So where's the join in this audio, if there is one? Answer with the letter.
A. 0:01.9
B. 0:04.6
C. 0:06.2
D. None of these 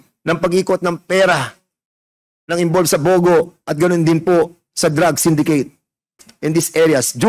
C